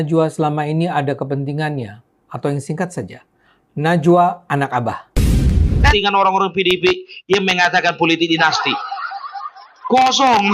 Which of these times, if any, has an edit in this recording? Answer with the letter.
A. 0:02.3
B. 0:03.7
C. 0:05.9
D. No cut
C